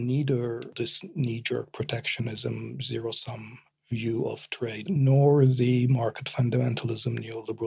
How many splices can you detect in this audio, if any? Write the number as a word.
one